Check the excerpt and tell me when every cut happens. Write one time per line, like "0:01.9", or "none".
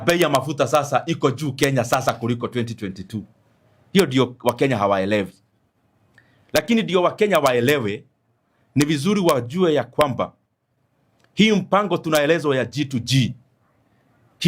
none